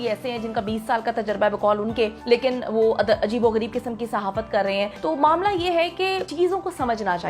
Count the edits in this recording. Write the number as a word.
three